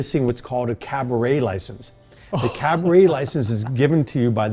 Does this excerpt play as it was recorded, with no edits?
yes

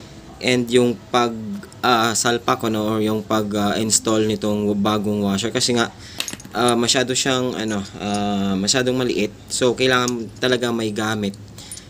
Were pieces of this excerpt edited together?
no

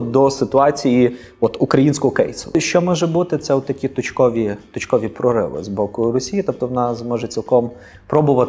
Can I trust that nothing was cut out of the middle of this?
no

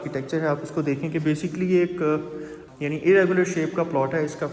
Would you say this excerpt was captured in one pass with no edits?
no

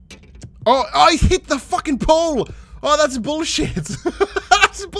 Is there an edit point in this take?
no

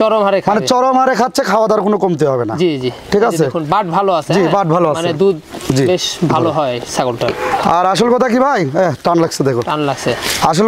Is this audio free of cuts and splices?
yes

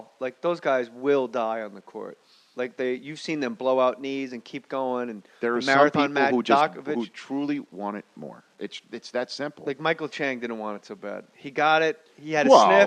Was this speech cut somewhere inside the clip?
no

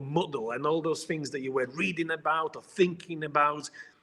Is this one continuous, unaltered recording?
yes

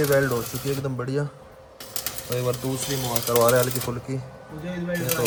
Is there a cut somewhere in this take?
no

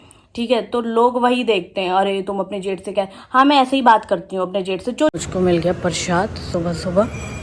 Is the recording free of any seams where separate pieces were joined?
no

